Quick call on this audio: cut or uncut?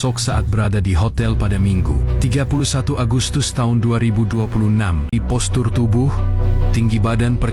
cut